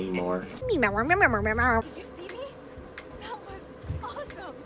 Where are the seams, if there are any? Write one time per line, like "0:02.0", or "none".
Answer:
0:01.9